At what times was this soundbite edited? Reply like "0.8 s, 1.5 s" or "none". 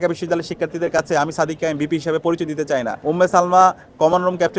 none